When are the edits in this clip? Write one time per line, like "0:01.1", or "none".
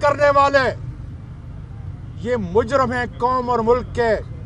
none